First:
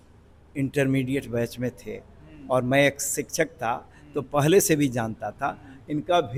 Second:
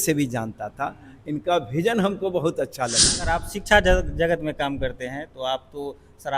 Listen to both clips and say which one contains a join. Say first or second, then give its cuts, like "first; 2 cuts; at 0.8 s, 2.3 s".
second; 1 cut; at 3.1 s